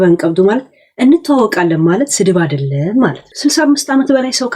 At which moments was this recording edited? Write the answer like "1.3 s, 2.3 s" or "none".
3.3 s